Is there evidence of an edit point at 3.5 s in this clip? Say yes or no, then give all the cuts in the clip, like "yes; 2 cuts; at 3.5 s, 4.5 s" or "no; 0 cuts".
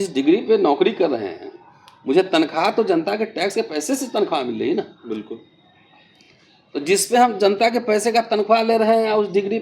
yes; 1 cut; at 3.5 s